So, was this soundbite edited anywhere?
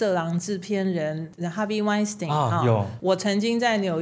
yes; 1 cut; at 2.9 s

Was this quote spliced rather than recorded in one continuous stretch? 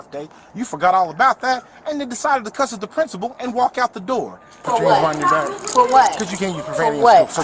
yes; 1 cut; at 4.5 s

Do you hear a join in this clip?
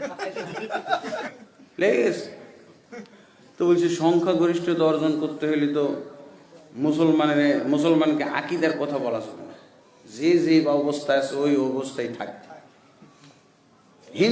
yes; 1 cut; at 1.3 s

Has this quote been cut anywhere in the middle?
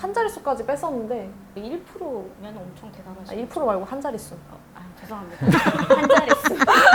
yes; 1 cut; at 1.4 s

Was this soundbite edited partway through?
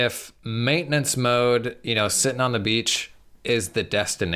no; 0 cuts

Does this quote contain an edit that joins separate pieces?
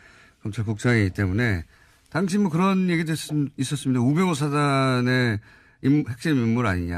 yes; 1 cut; at 3.7 s

